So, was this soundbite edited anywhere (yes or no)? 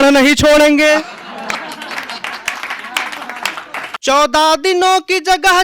yes